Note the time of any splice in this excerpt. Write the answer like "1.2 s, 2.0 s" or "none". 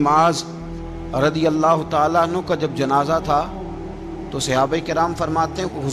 none